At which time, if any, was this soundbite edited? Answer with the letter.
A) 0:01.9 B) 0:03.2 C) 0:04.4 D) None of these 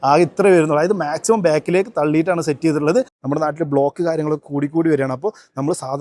B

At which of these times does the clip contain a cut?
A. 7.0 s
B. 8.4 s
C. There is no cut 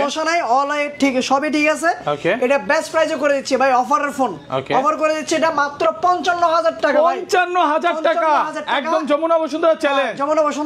C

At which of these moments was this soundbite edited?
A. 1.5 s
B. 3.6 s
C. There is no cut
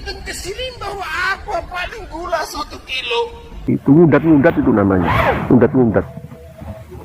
B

